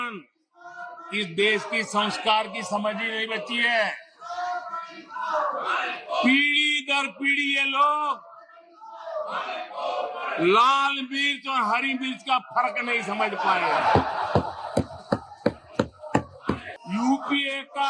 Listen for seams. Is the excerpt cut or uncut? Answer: cut